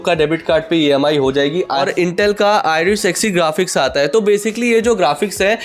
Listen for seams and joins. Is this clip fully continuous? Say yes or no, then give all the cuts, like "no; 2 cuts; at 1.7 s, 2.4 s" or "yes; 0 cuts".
no; 1 cut; at 1.7 s